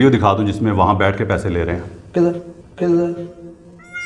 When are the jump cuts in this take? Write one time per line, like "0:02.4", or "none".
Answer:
none